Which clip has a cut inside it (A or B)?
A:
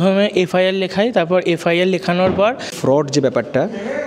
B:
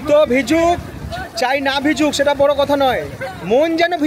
A